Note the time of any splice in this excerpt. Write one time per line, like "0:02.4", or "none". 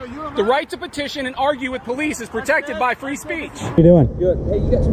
0:03.6